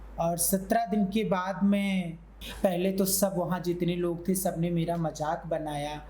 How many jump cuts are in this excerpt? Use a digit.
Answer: 1